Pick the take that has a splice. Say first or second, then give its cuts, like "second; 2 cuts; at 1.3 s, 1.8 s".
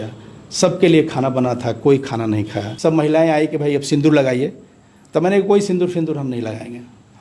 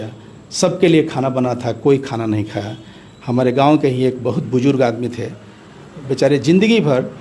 first; 1 cut; at 2.6 s